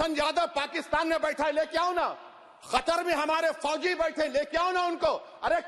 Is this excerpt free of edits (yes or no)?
yes